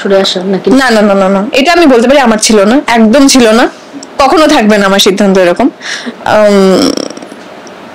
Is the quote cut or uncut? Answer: uncut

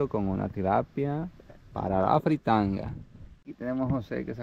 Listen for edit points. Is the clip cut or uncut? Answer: cut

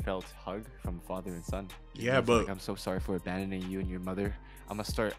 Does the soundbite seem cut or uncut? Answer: uncut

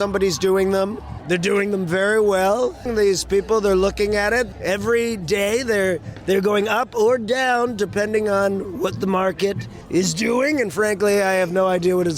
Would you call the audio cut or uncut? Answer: cut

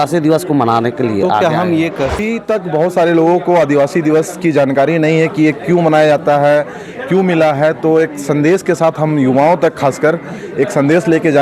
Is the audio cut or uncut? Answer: cut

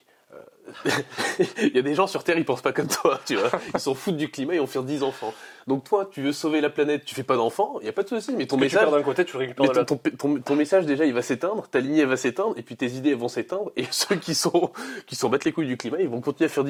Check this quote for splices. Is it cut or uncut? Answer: uncut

